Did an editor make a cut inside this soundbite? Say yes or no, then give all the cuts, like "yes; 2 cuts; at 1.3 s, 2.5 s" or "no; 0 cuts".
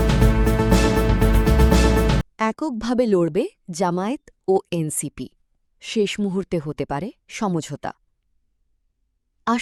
no; 0 cuts